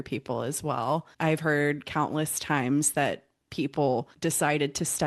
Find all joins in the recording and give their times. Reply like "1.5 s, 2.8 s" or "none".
1.1 s, 4.1 s